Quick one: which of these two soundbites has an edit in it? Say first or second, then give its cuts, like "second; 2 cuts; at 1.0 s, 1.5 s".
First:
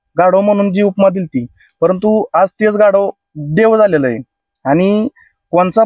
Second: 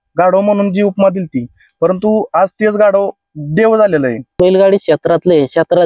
second; 1 cut; at 4.3 s